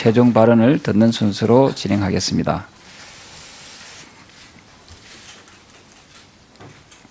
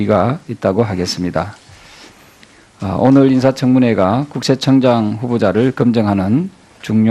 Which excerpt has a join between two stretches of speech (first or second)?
second